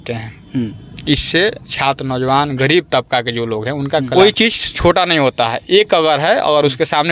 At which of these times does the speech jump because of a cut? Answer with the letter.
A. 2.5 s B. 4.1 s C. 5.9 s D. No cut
B